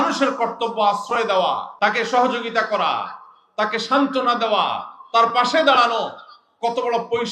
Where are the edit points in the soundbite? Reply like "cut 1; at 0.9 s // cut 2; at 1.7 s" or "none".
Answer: cut 1; at 1.7 s